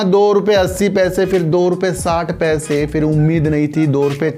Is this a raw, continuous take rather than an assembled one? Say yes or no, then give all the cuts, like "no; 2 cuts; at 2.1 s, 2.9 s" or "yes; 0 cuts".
yes; 0 cuts